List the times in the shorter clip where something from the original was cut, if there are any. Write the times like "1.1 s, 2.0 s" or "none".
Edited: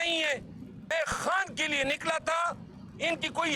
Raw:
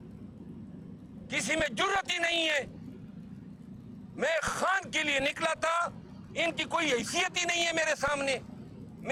0.9 s